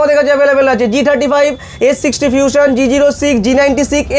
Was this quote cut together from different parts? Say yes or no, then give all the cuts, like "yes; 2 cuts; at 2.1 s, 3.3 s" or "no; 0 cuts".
no; 0 cuts